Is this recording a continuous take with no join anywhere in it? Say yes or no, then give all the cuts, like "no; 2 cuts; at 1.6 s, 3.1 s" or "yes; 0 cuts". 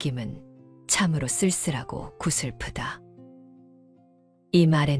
yes; 0 cuts